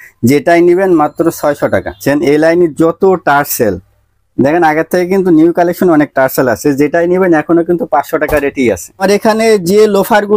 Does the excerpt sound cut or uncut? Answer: cut